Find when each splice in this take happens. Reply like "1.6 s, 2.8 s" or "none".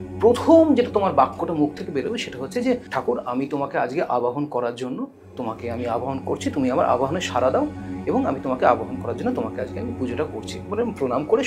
2.9 s